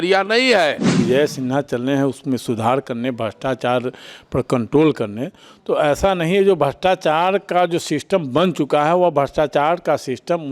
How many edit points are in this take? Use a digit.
1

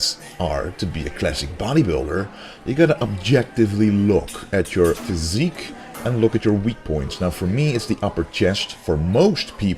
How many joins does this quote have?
1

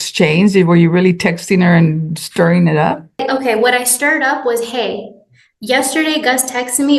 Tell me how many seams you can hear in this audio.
1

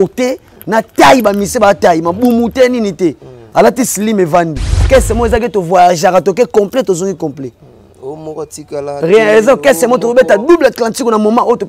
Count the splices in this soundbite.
1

